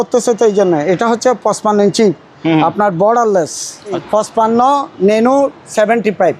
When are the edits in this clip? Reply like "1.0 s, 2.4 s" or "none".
4.0 s